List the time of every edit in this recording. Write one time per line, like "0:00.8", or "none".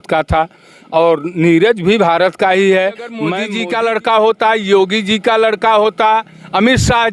0:03.4